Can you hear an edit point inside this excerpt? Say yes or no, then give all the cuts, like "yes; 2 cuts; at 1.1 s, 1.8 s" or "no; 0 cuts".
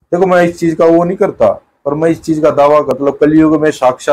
yes; 1 cut; at 2.9 s